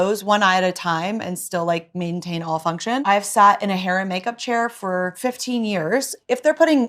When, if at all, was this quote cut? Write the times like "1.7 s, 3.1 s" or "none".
3.0 s

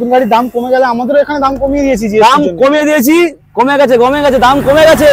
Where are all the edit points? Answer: 3.4 s

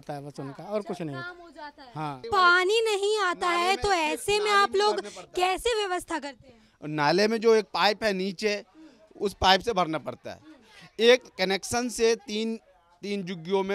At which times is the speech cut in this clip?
2.2 s

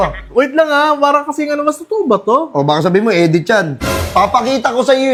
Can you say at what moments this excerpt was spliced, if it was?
none

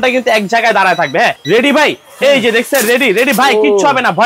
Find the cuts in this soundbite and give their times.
1.4 s

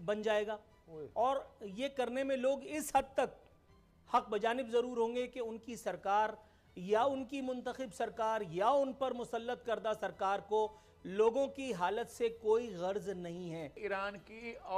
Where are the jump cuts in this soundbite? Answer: 13.8 s

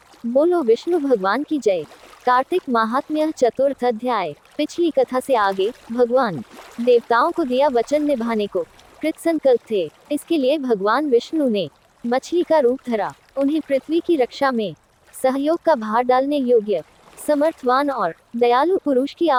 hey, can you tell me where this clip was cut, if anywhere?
none

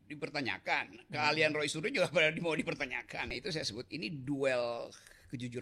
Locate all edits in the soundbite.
3.4 s

